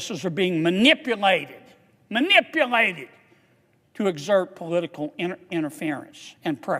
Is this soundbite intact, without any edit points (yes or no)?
yes